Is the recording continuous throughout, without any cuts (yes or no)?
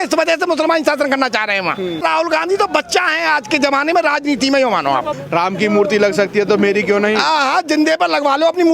no